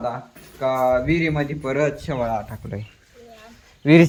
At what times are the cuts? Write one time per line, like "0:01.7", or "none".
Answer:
none